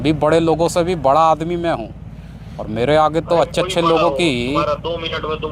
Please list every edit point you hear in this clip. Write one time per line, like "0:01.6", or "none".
none